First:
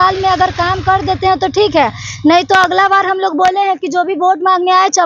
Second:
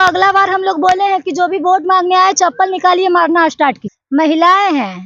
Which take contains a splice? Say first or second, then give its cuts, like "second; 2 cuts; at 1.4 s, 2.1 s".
second; 1 cut; at 3.9 s